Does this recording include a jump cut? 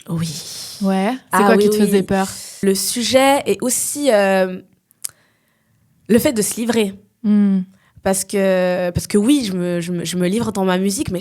yes; 1 cut; at 2.5 s

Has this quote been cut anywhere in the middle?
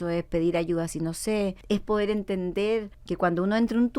yes; 2 cuts; at 1.6 s, 3.0 s

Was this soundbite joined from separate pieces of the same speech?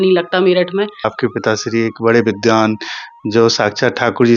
yes; 1 cut; at 1.1 s

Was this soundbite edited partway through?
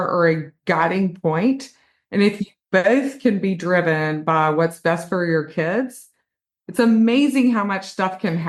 no; 0 cuts

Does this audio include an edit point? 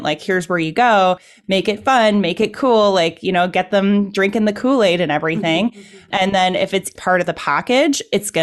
yes; 1 cut; at 6.9 s

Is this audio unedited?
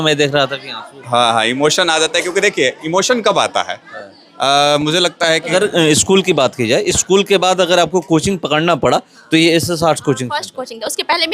no; 1 cut; at 5.5 s

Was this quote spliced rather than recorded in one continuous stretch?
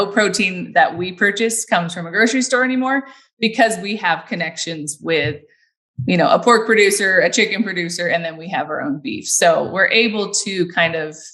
no; 0 cuts

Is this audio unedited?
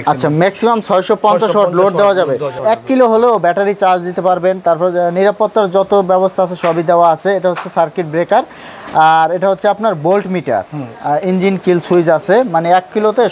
no; 1 cut; at 2.6 s

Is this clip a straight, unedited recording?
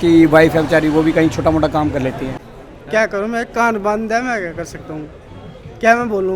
no; 1 cut; at 2.3 s

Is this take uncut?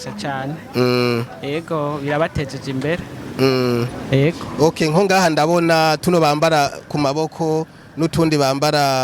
yes; 0 cuts

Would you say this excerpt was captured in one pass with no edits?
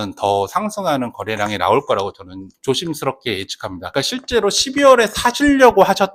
yes; 0 cuts

